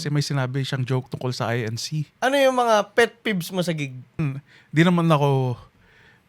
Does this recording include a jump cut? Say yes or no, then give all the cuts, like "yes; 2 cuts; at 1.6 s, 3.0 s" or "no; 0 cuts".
yes; 2 cuts; at 2.1 s, 4.2 s